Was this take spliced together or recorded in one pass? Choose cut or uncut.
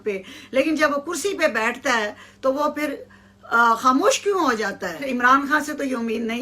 cut